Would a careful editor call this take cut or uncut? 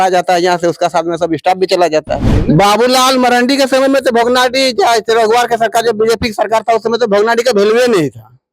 cut